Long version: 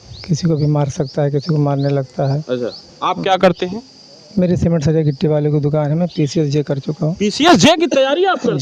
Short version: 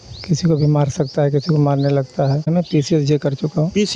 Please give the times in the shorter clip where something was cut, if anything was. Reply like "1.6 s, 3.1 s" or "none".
2.4 s